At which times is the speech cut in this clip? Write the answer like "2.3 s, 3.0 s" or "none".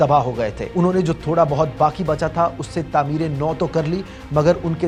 none